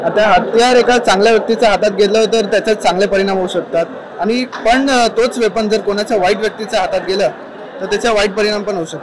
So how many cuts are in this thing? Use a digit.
0